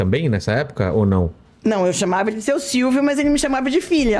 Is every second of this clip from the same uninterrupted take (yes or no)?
yes